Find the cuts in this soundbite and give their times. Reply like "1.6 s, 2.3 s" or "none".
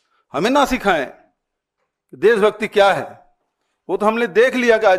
none